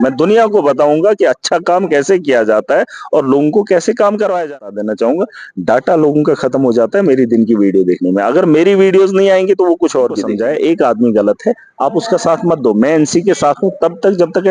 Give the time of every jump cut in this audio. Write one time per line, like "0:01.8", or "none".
0:04.6
0:10.3